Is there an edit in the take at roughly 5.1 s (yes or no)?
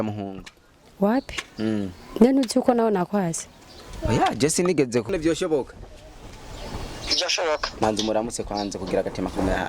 yes